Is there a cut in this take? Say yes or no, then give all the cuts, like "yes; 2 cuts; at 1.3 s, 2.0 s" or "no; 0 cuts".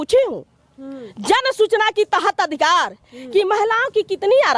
no; 0 cuts